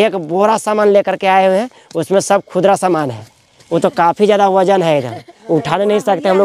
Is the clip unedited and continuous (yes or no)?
yes